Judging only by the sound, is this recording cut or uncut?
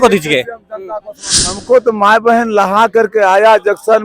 cut